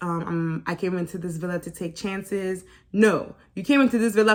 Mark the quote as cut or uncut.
uncut